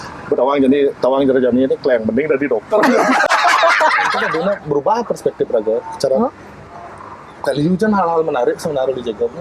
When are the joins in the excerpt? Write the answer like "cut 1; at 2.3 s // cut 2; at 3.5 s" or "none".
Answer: cut 1; at 4.3 s